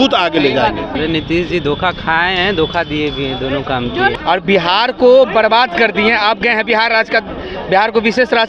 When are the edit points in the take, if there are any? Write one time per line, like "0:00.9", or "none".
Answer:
0:00.9
0:04.1